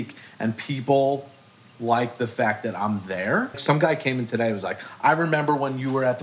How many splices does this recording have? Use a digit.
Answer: 1